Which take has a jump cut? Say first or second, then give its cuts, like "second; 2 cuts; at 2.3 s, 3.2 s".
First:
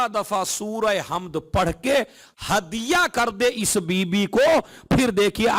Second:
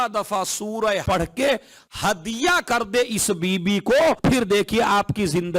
second; 2 cuts; at 1.0 s, 4.2 s